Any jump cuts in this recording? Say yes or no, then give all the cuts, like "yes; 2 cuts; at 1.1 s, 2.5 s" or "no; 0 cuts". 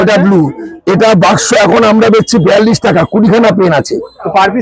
no; 0 cuts